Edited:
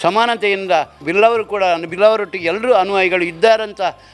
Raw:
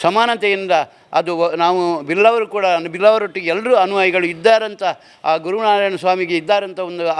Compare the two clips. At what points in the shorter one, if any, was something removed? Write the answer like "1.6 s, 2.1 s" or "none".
1.0 s